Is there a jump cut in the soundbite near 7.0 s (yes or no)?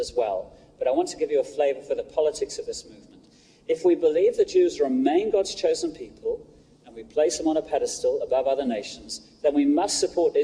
no